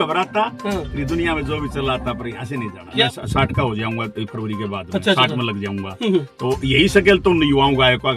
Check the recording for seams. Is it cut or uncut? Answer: cut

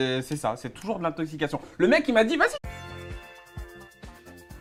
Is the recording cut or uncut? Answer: uncut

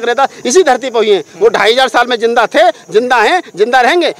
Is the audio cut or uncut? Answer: uncut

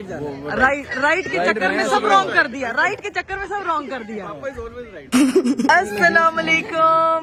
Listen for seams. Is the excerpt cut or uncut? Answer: uncut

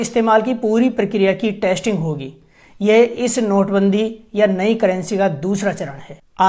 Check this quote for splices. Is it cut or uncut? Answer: uncut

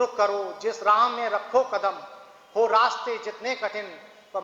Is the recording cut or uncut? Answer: uncut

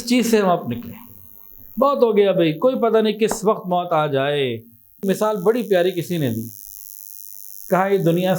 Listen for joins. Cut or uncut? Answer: cut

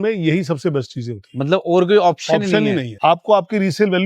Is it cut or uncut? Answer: cut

